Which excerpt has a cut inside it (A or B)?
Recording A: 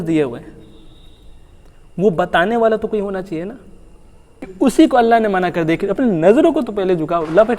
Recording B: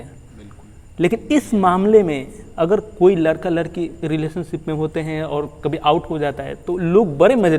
A